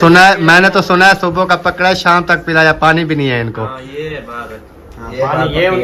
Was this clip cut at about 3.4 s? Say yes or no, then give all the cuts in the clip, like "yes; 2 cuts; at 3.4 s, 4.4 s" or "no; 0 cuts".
no; 0 cuts